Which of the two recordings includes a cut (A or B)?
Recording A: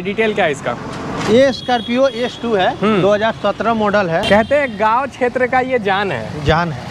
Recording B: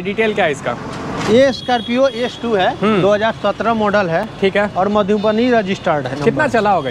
A